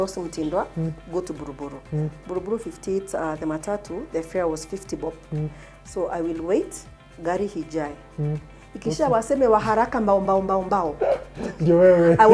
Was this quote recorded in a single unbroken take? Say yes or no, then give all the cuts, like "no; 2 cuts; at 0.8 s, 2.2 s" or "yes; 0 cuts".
yes; 0 cuts